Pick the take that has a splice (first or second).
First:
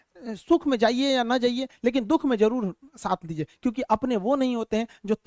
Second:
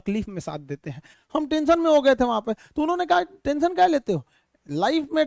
second